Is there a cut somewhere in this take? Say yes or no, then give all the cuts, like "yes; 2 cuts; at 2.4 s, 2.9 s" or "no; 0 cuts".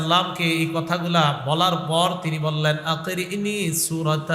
no; 0 cuts